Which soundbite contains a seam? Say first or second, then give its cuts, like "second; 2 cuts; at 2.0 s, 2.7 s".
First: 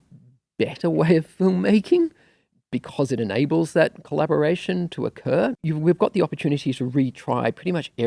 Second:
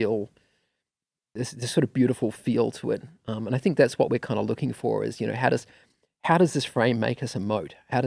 first; 1 cut; at 5.6 s